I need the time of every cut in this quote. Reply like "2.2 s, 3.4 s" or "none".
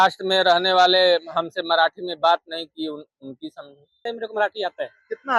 4.0 s